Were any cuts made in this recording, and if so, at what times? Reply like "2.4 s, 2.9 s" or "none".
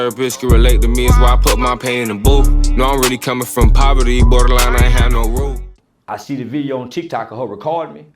5.7 s

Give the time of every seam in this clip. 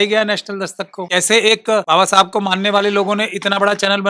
1.0 s, 1.8 s

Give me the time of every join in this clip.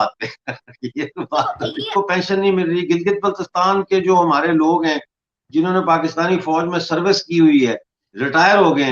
1.9 s

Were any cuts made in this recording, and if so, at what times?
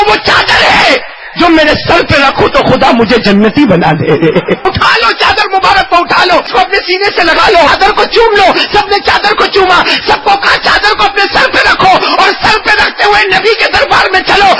4.6 s, 6.5 s, 7.7 s

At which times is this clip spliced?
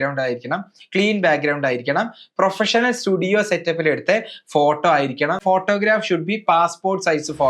5.4 s

